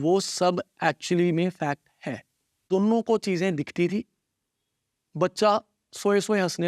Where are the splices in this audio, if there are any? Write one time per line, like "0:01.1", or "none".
0:02.6